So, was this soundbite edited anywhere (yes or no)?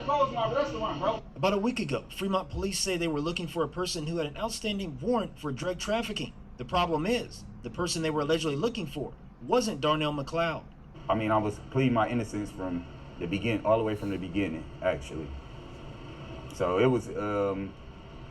yes